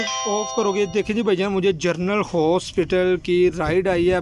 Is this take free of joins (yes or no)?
yes